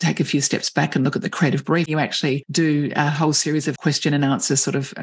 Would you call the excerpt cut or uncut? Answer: cut